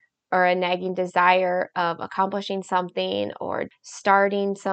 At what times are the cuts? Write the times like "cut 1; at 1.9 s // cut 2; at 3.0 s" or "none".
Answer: cut 1; at 3.7 s